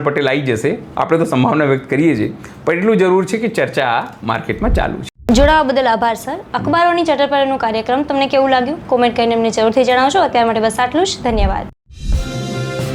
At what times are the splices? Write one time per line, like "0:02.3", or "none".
none